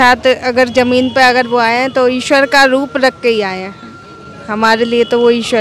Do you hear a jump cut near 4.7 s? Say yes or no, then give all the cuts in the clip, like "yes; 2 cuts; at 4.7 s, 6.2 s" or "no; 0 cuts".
no; 0 cuts